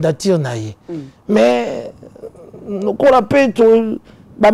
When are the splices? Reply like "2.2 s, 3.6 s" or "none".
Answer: none